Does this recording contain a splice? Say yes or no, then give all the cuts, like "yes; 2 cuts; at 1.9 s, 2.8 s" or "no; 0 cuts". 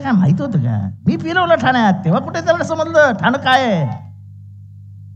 no; 0 cuts